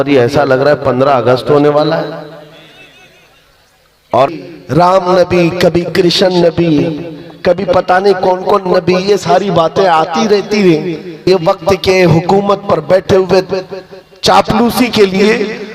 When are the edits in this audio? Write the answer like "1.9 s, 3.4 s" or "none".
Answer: 4.3 s, 11.3 s